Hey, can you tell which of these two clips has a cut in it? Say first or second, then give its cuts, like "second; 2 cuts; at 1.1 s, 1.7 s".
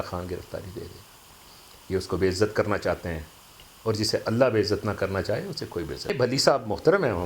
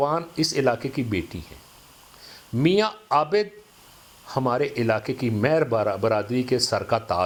first; 1 cut; at 6.1 s